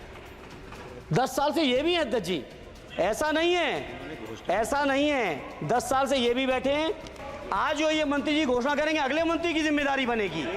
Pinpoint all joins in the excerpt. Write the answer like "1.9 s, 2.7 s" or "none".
7.3 s